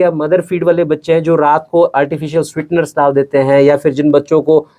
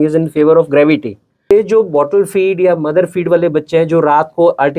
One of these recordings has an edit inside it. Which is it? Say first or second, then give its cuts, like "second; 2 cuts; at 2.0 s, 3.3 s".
second; 1 cut; at 1.5 s